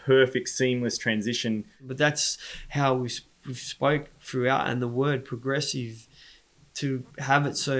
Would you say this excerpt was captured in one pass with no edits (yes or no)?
no